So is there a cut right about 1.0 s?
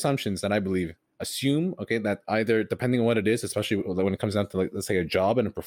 yes; 1 cut; at 1.0 s

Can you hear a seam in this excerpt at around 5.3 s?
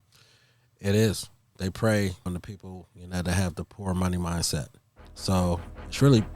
yes; 1 cut; at 5.3 s

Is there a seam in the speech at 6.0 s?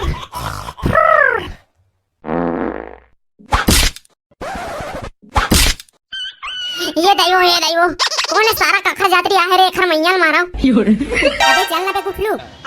no; 1 cut; at 11.4 s

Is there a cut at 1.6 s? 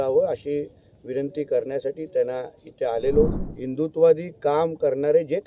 no; 1 cut; at 3.3 s

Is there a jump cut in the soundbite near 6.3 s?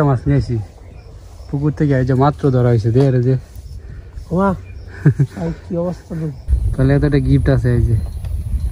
yes; 1 cut; at 6.3 s

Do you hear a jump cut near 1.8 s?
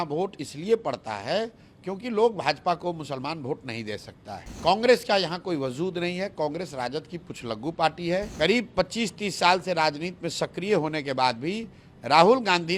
no; 2 cuts; at 4.5 s, 8.3 s

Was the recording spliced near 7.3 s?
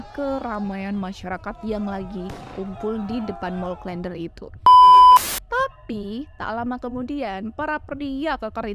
no; 2 cuts; at 4.6 s, 5.4 s

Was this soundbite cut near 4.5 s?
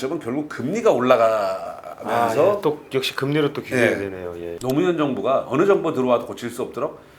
yes; 1 cut; at 4.5 s

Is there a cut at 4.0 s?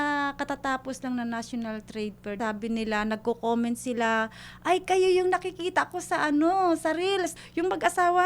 no; 2 cuts; at 2.4 s, 7.3 s

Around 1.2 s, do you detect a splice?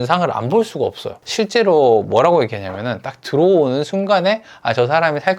yes; 1 cut; at 1.2 s

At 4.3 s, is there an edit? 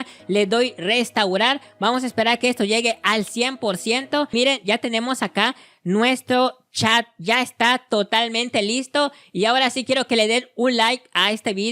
yes; 1 cut; at 4.3 s

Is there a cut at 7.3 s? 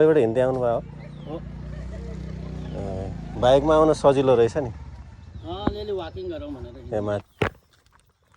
yes; 1 cut; at 7.3 s

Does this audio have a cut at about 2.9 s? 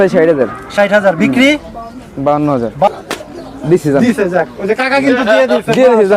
yes; 1 cut; at 2.9 s

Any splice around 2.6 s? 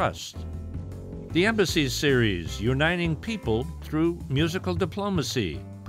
no; 0 cuts

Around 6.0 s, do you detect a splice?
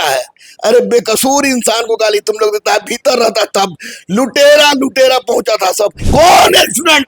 yes; 1 cut; at 6.0 s

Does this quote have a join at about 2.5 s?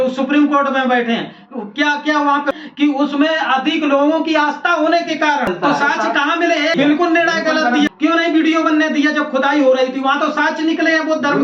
yes; 4 cuts; at 2.5 s, 5.5 s, 6.7 s, 7.9 s

